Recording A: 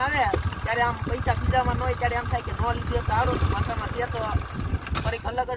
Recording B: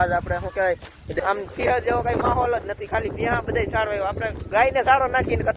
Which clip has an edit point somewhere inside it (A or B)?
B